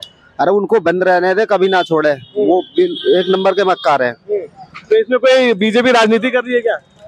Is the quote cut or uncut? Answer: uncut